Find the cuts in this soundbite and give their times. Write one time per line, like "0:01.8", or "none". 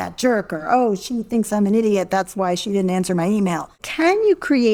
0:03.8